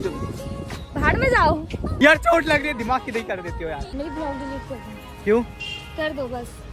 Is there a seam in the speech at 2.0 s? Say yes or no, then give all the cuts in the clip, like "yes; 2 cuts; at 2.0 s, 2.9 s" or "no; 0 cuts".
yes; 2 cuts; at 2.0 s, 4.0 s